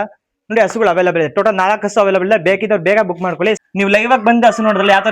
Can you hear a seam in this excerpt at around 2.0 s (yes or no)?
no